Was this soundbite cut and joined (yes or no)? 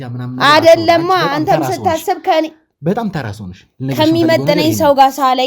no